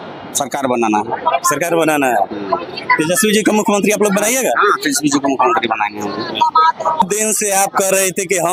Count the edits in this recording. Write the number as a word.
zero